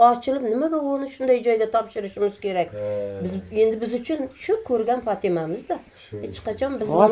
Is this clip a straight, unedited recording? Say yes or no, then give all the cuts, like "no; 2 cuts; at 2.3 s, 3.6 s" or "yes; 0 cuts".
yes; 0 cuts